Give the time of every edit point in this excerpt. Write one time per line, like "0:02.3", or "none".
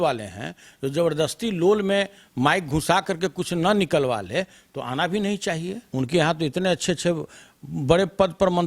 0:05.8

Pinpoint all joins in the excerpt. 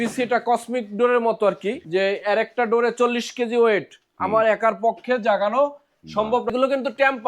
0:01.8
0:06.5

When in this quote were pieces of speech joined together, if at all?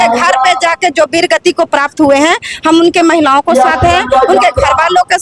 none

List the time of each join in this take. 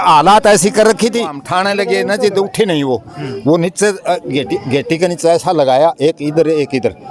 0:01.4

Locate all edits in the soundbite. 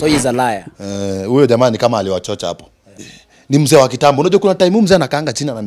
0:03.0

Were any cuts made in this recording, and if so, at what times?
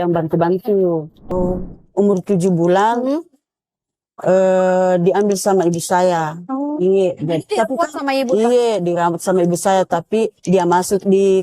0:01.3

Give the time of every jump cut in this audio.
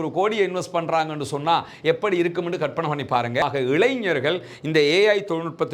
0:03.4

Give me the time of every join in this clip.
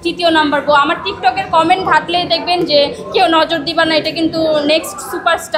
none

